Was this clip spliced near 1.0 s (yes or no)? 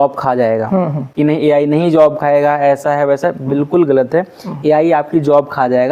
yes